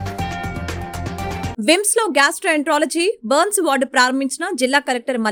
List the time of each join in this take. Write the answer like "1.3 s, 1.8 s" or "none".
none